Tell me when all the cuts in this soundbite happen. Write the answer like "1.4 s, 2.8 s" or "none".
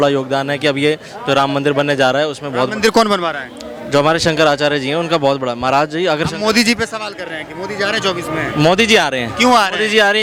none